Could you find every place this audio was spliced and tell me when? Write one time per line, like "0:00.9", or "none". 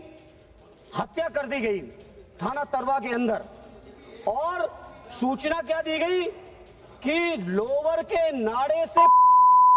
none